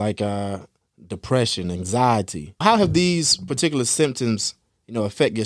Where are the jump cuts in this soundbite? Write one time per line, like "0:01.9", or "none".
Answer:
0:02.6